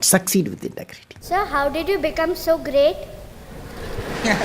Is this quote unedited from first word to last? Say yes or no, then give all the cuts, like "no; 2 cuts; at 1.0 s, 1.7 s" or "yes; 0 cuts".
no; 1 cut; at 1.2 s